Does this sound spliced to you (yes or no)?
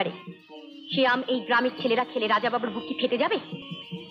no